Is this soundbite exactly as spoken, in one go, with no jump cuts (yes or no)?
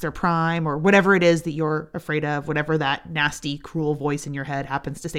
yes